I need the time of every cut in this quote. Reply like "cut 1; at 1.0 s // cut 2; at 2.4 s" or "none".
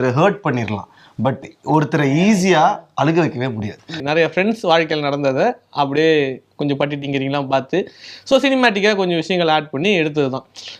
cut 1; at 4.0 s